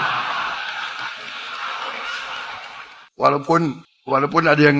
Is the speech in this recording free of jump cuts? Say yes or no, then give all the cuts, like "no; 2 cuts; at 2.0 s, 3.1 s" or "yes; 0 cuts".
no; 2 cuts; at 3.0 s, 3.9 s